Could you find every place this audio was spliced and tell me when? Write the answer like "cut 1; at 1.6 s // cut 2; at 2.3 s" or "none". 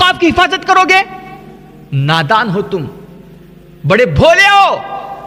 none